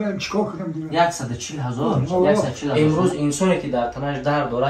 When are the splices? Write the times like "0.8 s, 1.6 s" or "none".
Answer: 2.7 s